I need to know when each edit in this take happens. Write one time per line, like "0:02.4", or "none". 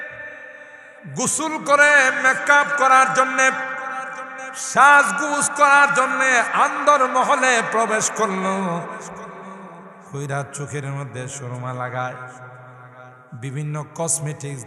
none